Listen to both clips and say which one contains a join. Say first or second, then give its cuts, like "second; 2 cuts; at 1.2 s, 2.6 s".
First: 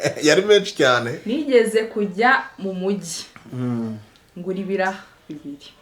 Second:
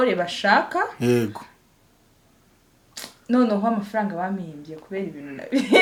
first; 1 cut; at 1.1 s